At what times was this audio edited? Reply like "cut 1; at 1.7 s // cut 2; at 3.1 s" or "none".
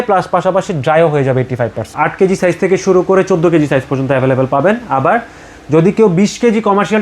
cut 1; at 1.9 s